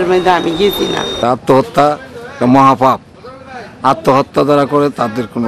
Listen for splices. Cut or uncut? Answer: cut